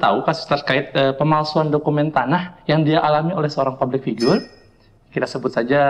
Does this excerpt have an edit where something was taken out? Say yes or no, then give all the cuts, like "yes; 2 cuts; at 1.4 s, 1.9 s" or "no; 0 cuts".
no; 0 cuts